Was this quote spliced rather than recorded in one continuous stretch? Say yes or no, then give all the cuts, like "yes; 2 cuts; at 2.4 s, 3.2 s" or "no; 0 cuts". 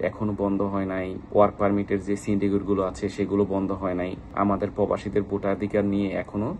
yes; 2 cuts; at 1.2 s, 4.2 s